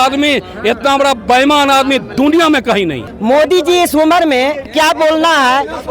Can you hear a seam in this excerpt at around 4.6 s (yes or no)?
no